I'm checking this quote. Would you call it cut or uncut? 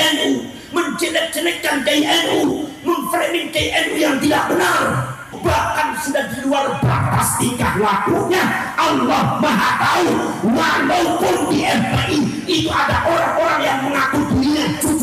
cut